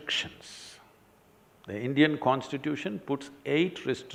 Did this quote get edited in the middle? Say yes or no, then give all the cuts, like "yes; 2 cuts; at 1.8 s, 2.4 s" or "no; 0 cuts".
no; 0 cuts